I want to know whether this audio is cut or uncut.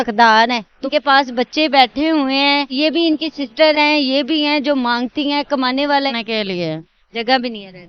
cut